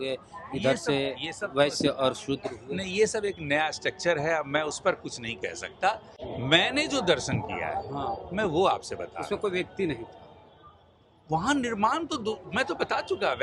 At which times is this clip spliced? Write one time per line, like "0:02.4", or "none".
none